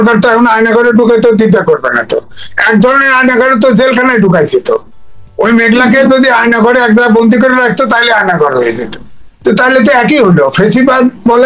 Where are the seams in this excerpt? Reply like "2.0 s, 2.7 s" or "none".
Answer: none